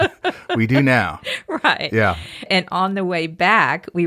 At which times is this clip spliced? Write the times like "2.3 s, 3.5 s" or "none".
none